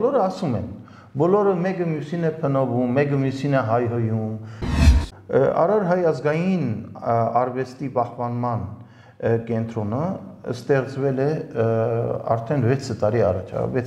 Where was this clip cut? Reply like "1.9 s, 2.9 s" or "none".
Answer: 4.8 s